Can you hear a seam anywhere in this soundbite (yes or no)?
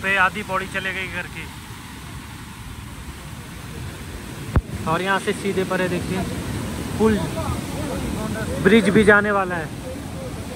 no